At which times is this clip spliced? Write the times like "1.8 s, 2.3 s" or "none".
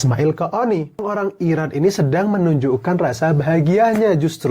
1.1 s